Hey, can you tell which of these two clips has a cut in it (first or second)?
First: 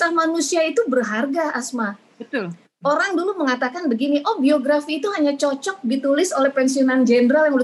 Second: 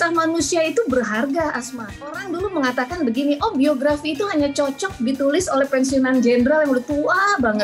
second